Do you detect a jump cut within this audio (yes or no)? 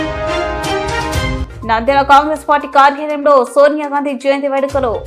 yes